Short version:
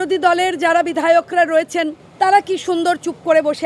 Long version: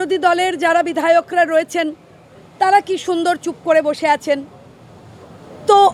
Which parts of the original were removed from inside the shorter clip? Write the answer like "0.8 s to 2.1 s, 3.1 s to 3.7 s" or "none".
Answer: 2.0 s to 2.4 s